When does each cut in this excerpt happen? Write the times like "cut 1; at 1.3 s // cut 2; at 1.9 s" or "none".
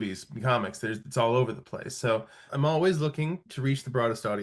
cut 1; at 2.5 s